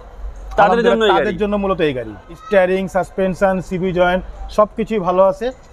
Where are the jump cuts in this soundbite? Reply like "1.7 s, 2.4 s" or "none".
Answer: 2.3 s